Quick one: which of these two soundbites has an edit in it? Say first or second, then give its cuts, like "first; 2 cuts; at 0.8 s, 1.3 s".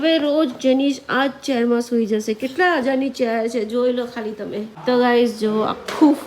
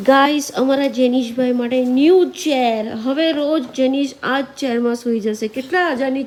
first; 1 cut; at 4.7 s